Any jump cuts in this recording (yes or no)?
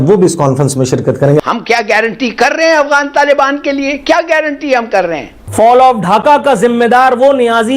yes